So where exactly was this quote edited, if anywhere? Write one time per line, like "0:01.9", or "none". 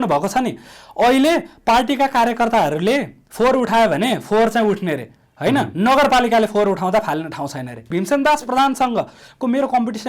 0:07.8